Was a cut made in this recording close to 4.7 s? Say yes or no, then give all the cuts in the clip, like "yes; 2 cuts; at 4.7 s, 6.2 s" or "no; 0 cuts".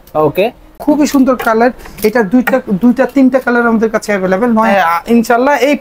yes; 1 cut; at 4.7 s